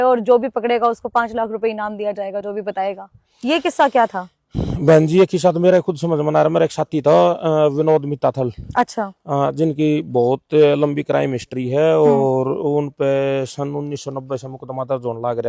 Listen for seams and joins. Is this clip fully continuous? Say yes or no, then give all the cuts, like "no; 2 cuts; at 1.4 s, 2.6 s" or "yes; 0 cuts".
yes; 0 cuts